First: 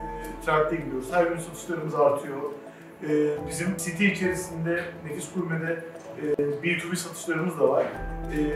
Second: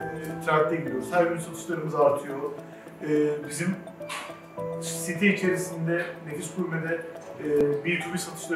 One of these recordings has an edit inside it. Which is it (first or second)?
first